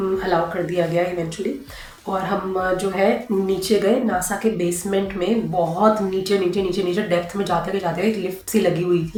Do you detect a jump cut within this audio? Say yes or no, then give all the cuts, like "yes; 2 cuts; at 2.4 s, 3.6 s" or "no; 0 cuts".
no; 0 cuts